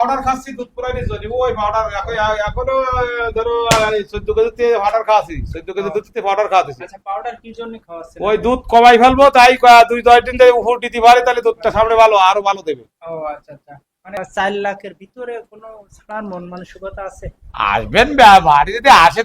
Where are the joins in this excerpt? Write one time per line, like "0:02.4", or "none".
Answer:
0:14.2